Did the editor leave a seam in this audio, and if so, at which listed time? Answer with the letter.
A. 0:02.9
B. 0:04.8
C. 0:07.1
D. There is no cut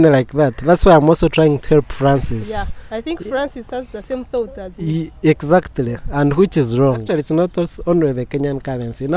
C